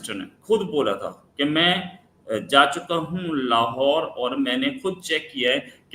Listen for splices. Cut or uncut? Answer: uncut